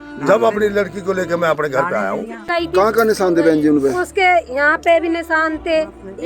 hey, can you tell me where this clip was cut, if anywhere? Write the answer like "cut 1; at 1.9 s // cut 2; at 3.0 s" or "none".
cut 1; at 2.5 s